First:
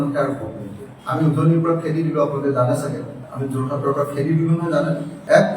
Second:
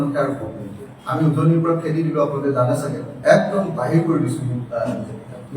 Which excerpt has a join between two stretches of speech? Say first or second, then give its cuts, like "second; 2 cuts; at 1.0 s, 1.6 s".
second; 1 cut; at 3.1 s